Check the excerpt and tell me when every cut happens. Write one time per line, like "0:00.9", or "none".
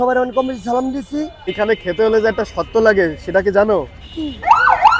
0:01.5